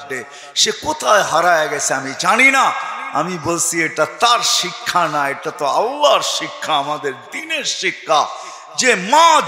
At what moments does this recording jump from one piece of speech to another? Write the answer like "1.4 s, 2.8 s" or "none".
none